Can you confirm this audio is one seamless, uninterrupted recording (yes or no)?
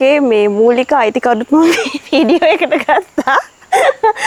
yes